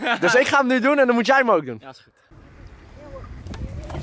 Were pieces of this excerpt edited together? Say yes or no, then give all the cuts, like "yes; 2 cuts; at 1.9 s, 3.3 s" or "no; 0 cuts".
yes; 1 cut; at 2.1 s